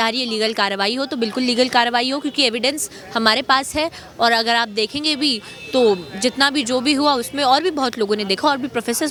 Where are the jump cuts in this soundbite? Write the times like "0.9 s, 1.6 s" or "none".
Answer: none